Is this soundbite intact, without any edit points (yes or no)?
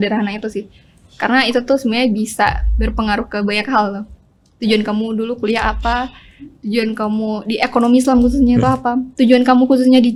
yes